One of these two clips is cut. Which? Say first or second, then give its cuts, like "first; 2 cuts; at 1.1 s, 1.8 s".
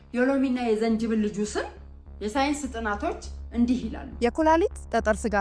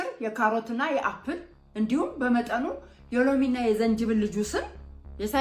first; 1 cut; at 4.2 s